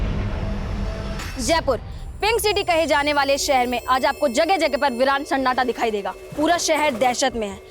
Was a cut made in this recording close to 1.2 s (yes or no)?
yes